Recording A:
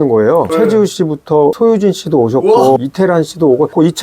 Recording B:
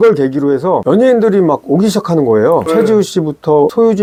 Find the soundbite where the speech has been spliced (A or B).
A